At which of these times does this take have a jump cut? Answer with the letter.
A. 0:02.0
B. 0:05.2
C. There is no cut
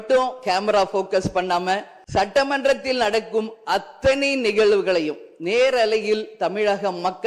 A